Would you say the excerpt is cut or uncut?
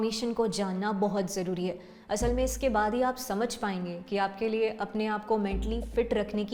uncut